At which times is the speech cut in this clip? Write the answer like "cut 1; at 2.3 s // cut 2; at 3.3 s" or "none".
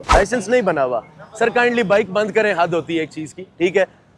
none

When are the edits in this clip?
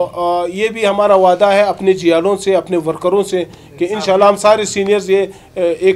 none

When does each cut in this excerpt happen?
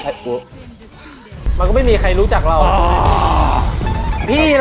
none

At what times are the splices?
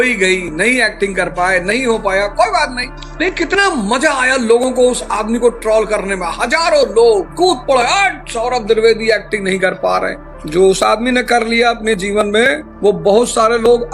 none

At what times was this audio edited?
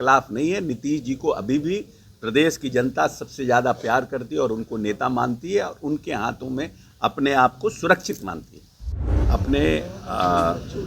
cut 1; at 9.1 s

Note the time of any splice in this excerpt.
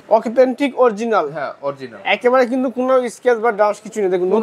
none

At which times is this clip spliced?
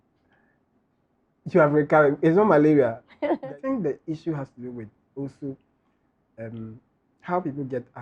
cut 1; at 3.4 s

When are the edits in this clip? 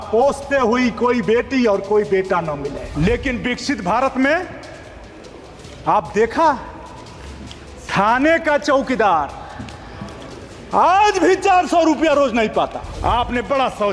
cut 1; at 2.9 s // cut 2; at 12.9 s

